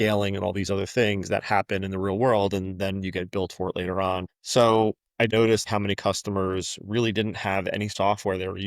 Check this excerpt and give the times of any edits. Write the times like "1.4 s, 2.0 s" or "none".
4.4 s, 5.4 s, 7.9 s